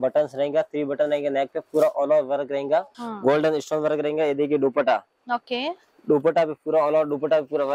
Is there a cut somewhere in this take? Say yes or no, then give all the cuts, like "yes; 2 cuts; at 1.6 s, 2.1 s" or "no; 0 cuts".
yes; 1 cut; at 3.0 s